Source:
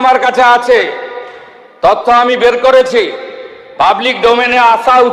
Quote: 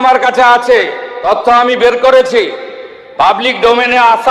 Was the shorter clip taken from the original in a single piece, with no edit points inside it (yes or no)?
no